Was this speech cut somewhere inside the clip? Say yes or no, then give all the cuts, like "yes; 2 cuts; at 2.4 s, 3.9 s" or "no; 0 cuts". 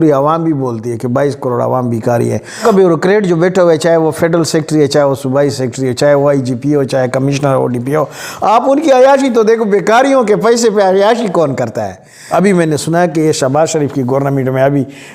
yes; 2 cuts; at 2.6 s, 12.1 s